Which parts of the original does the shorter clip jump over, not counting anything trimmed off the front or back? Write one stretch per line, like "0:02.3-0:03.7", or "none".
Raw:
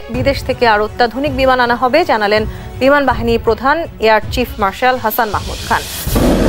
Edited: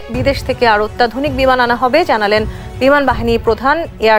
none